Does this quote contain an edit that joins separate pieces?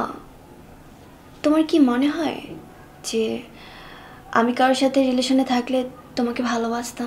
no; 0 cuts

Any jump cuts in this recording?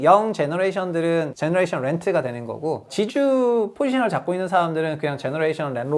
yes; 1 cut; at 2.9 s

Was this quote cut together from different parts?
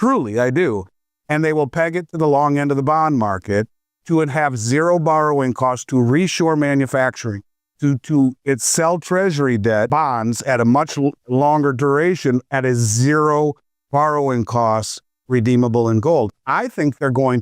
yes; 1 cut; at 9.9 s

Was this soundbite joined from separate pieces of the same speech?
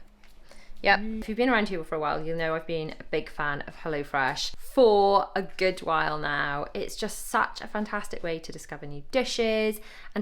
yes; 2 cuts; at 1.2 s, 4.5 s

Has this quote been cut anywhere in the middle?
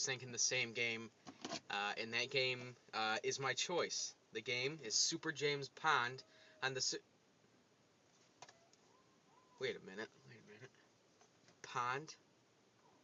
no; 0 cuts

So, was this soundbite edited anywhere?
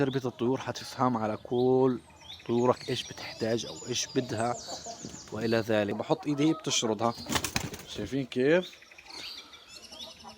yes; 1 cut; at 6.0 s

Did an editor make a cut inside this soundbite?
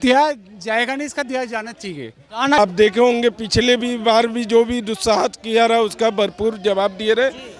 yes; 1 cut; at 2.6 s

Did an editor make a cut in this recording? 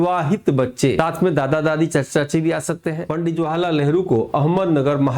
yes; 2 cuts; at 1.0 s, 3.0 s

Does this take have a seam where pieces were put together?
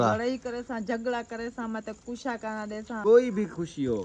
yes; 1 cut; at 3.0 s

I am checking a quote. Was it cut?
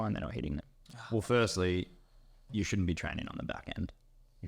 no; 0 cuts

